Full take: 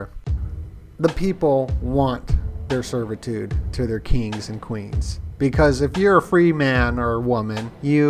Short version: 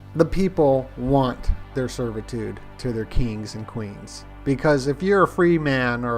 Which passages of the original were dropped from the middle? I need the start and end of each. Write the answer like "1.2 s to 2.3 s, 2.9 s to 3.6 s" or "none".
2.4 s to 2.5 s